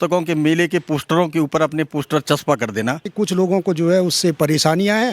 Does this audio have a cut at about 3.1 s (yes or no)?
yes